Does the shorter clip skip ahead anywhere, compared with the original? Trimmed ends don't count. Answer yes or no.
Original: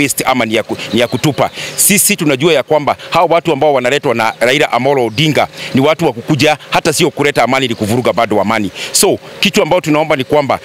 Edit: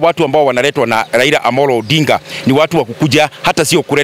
no